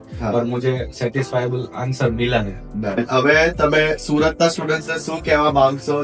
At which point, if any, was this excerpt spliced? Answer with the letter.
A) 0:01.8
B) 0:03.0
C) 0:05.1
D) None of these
B